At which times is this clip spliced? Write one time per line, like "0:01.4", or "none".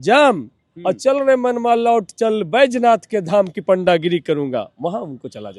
none